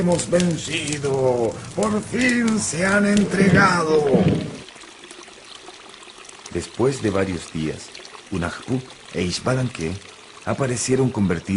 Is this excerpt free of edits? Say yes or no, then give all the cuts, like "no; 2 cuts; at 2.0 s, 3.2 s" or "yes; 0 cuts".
no; 1 cut; at 10.4 s